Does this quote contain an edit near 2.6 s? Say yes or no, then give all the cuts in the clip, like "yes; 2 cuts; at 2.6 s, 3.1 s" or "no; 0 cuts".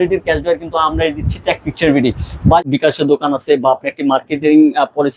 yes; 1 cut; at 2.6 s